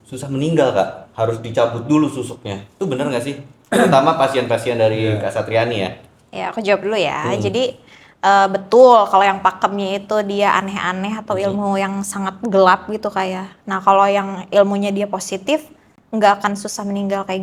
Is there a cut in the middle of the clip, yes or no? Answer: no